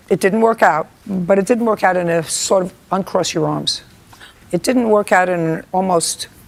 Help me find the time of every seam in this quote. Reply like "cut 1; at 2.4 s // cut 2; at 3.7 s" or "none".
none